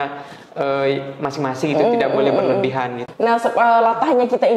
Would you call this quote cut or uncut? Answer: cut